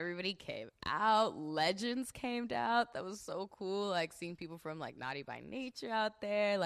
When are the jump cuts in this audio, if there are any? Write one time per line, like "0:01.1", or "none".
0:03.0